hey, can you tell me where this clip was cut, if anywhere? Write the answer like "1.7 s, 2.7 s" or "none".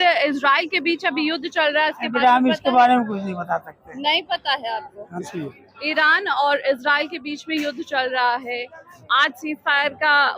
5.2 s